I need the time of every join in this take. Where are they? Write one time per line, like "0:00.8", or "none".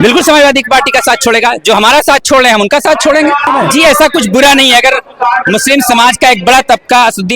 0:03.5